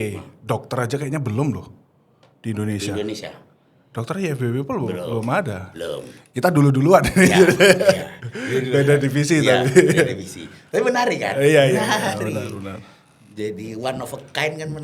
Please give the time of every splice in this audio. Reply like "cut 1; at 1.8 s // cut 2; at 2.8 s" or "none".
none